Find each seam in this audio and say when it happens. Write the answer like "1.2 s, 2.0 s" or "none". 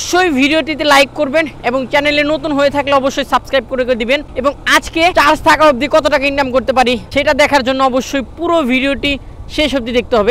4.5 s, 7.0 s